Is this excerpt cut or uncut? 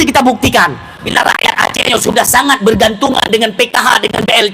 cut